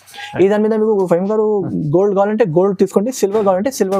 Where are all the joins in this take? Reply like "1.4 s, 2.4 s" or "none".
none